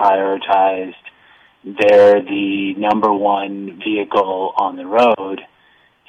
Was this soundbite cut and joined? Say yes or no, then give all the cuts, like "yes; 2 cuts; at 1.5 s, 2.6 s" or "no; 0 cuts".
no; 0 cuts